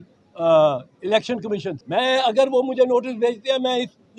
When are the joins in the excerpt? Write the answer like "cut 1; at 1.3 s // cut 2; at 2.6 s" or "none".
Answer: cut 1; at 1.8 s